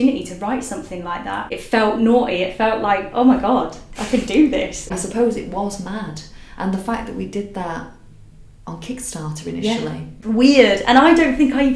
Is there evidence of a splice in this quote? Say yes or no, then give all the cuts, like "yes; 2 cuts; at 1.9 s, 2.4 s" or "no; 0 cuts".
yes; 3 cuts; at 1.5 s, 4.9 s, 10.1 s